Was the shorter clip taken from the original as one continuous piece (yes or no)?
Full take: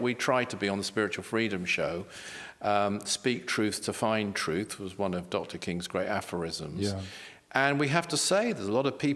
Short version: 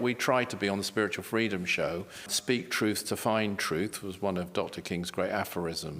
no